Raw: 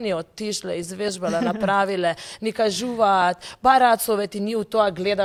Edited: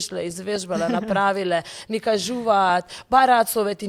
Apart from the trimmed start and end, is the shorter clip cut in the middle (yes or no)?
no